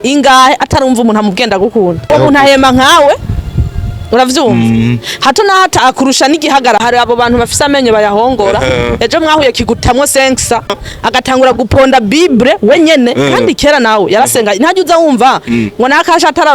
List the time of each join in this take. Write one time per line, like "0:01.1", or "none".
0:02.1
0:06.8
0:10.8